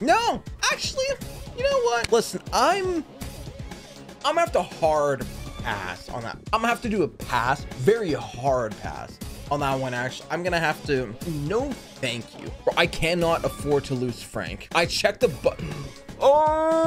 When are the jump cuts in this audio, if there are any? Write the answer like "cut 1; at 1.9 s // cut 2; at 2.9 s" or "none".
cut 1; at 2.0 s // cut 2; at 6.4 s // cut 3; at 11.2 s // cut 4; at 12.6 s // cut 5; at 14.5 s